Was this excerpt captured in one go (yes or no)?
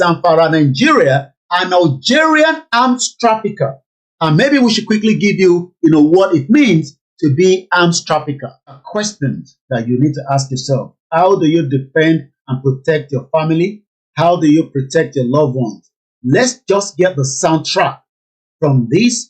no